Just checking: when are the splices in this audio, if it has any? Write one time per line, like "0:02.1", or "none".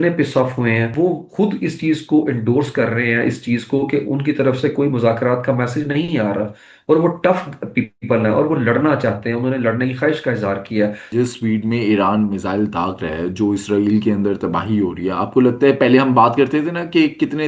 0:00.9
0:11.1

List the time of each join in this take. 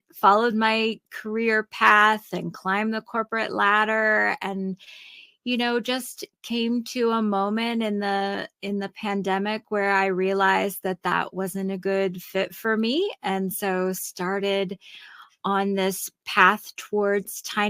none

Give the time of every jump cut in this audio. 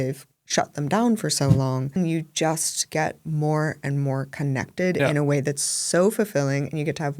0:02.0

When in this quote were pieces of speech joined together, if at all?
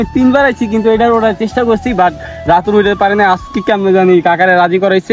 none

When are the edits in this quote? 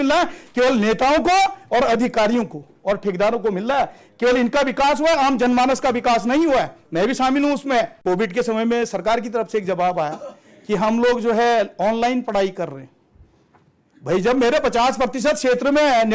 0:07.9

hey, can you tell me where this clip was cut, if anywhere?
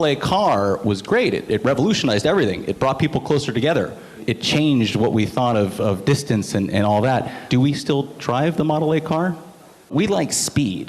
0:01.0
0:04.2
0:07.4
0:09.9

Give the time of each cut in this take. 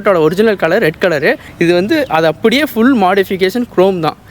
0:01.5

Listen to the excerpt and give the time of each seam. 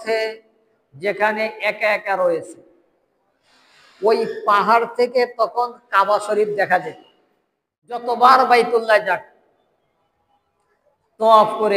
0:08.0

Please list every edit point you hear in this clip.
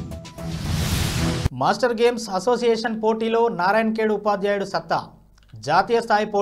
0:01.5

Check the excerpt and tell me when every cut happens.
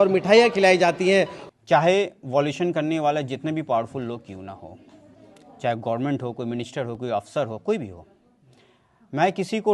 0:01.4

